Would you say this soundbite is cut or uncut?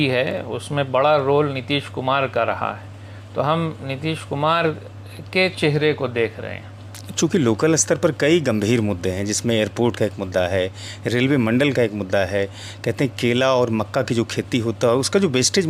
uncut